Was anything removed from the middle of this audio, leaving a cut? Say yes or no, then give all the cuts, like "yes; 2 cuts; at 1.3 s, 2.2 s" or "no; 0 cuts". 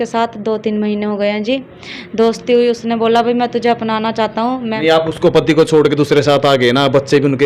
yes; 1 cut; at 4.8 s